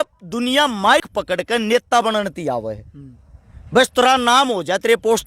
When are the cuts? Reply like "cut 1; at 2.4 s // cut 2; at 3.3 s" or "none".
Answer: cut 1; at 1.0 s